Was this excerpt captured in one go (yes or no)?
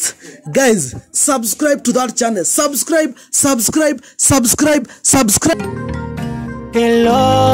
no